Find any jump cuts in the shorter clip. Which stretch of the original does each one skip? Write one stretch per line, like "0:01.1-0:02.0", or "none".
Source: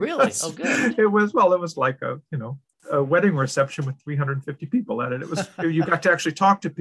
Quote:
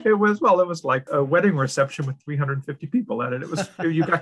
0:02.0-0:02.8